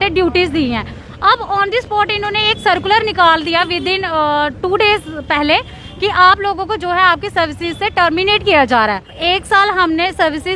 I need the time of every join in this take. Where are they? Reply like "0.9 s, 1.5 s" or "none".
9.1 s